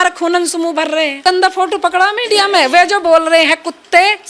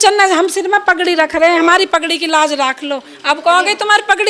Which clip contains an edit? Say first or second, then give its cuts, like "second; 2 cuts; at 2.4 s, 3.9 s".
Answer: first; 1 cut; at 1.2 s